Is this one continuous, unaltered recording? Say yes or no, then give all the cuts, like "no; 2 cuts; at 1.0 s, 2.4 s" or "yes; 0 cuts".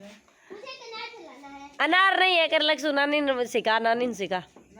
yes; 0 cuts